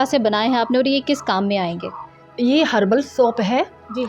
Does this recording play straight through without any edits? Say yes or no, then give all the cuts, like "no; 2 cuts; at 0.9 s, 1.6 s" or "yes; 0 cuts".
no; 1 cut; at 2.2 s